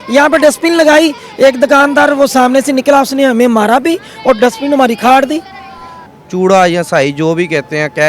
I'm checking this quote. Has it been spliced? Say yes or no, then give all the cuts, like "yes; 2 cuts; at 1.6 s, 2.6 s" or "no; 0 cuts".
yes; 1 cut; at 5.9 s